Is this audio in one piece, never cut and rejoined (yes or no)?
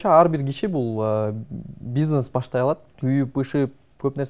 no